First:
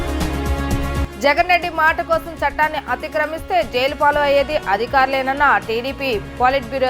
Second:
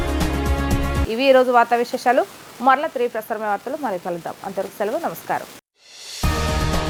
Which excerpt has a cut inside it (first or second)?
first